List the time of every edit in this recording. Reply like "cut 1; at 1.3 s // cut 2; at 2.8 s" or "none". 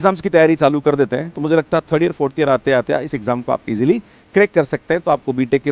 none

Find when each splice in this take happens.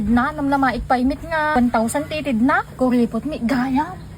cut 1; at 1.5 s // cut 2; at 2.7 s

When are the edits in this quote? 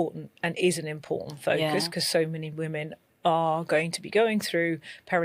none

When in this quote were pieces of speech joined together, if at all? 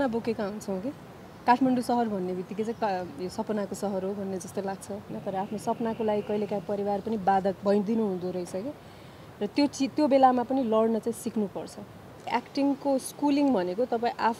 cut 1; at 5.1 s // cut 2; at 7.6 s // cut 3; at 12.3 s

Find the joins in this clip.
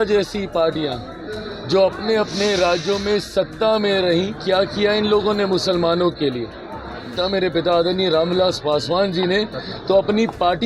cut 1; at 7.2 s

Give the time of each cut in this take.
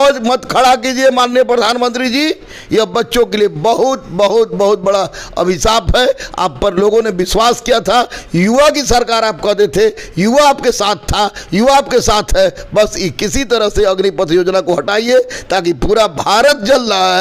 none

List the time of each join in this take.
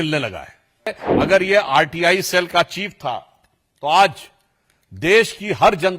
cut 1; at 1.0 s

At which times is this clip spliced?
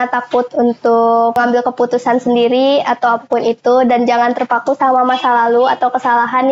cut 1; at 1.4 s

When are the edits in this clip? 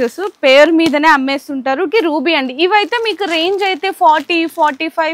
cut 1; at 1.9 s

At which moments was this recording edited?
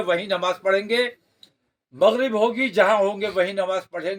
none

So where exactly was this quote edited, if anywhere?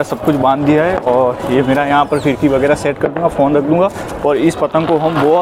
none

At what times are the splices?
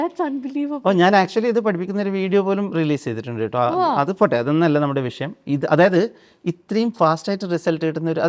none

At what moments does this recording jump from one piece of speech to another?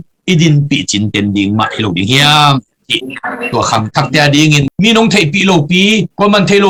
none

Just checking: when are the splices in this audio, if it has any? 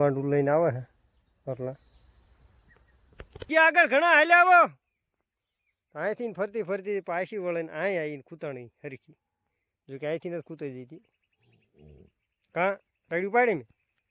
cut 1; at 3.5 s

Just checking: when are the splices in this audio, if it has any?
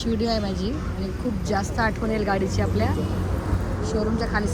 none

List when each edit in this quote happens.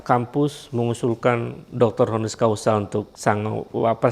cut 1; at 3.1 s

